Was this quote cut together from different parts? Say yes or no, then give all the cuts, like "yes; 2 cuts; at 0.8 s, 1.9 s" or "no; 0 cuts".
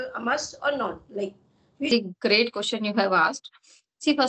yes; 1 cut; at 1.9 s